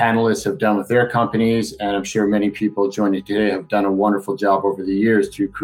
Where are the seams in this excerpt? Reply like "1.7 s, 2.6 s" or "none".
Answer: none